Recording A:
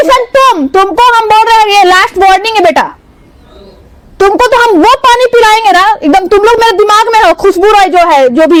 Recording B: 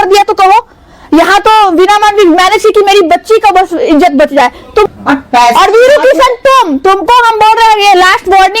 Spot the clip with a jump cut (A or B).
B